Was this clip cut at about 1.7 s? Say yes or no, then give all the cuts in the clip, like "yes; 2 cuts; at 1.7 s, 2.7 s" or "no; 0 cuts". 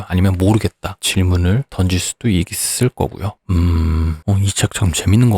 yes; 4 cuts; at 0.9 s, 1.7 s, 3.4 s, 4.2 s